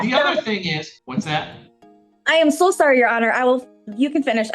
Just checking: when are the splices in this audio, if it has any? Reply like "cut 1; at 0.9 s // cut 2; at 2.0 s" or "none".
cut 1; at 1.0 s